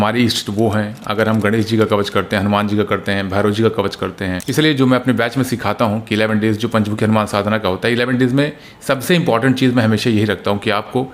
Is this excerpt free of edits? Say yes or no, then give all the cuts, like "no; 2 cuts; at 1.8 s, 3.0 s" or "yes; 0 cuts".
no; 1 cut; at 4.4 s